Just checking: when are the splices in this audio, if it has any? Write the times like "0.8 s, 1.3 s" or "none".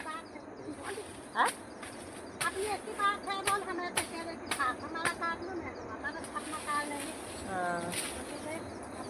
none